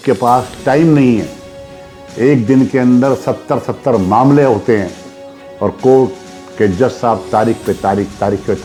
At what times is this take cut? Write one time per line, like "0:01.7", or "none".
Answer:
none

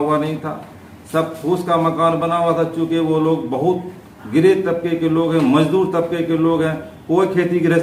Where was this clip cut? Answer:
none

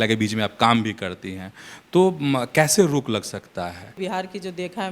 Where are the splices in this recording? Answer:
0:04.0

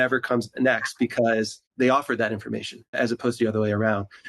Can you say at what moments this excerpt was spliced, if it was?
0:01.6
0:03.0

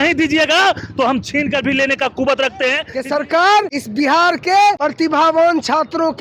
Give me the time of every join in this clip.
0:02.9
0:03.8
0:04.8

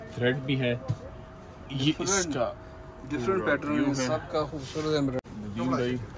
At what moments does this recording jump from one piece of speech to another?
0:05.2

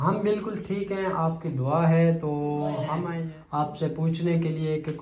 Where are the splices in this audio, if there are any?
0:03.1

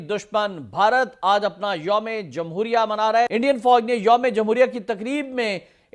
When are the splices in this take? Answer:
0:03.3

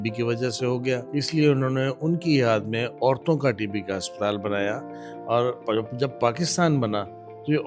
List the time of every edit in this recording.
0:01.1

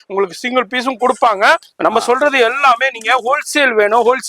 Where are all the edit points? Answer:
0:01.7

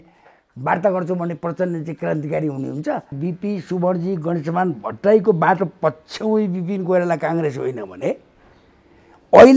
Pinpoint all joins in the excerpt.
0:03.2

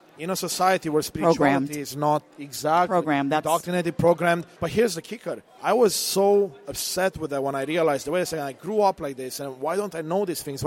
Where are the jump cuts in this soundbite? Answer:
0:04.5
0:05.5

